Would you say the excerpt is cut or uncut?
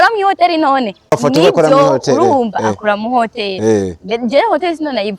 cut